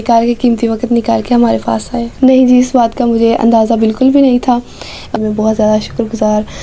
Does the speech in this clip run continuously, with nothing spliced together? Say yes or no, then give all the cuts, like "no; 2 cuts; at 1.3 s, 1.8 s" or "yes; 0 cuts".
no; 2 cuts; at 2.0 s, 5.1 s